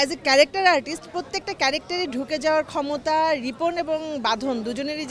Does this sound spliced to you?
no; 0 cuts

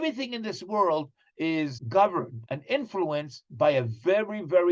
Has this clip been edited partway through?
yes; 3 cuts; at 1.8 s, 2.4 s, 3.4 s

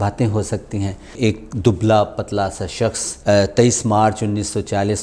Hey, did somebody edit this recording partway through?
yes; 2 cuts; at 1.2 s, 3.1 s

